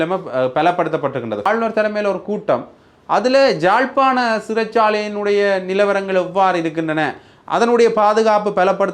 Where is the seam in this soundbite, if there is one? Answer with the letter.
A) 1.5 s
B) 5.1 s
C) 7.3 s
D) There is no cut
A